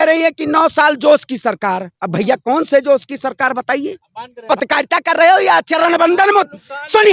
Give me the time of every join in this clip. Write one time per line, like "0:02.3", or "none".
0:04.4